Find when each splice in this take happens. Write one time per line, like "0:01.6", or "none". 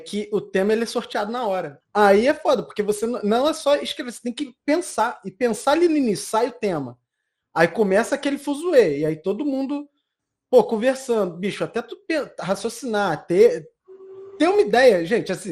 0:01.8

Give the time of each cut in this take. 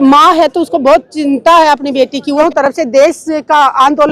0:02.4

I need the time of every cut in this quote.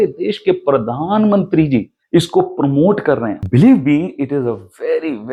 none

